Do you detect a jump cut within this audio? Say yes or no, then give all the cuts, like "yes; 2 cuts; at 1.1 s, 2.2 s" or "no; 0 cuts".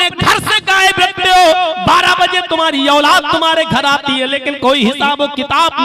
no; 0 cuts